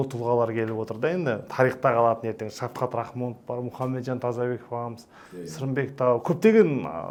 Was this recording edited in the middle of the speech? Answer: no; 0 cuts

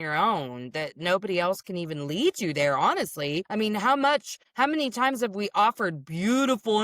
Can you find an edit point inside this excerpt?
yes; 2 cuts; at 3.4 s, 4.4 s

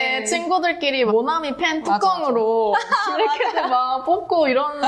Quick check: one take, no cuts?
yes; 0 cuts

